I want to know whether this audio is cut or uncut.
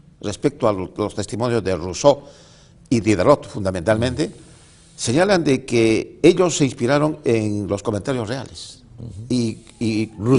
uncut